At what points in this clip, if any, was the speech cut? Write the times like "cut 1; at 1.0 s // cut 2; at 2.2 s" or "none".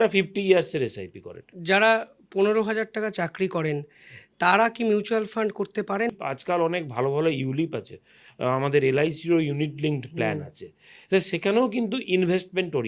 cut 1; at 1.5 s // cut 2; at 6.1 s